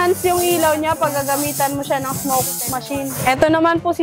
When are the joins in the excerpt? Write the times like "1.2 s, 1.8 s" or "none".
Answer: 3.1 s